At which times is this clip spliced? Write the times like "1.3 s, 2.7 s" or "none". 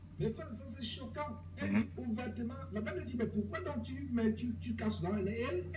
0.9 s